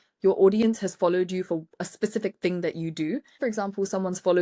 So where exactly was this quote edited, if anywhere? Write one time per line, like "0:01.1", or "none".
0:03.4